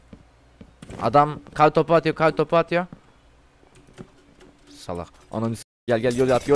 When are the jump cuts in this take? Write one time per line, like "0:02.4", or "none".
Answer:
none